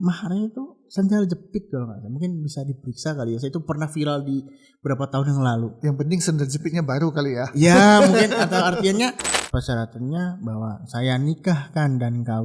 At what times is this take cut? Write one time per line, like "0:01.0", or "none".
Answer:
0:09.3